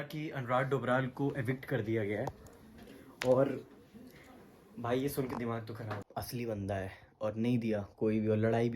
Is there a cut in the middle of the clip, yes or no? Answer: yes